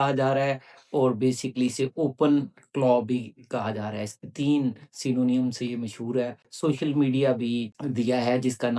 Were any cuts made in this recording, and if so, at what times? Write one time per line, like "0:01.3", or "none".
0:06.4